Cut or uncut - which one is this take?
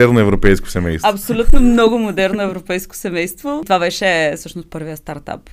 cut